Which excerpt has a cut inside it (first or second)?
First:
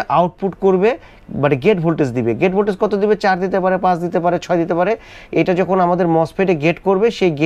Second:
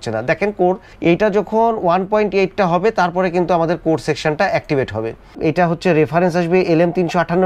second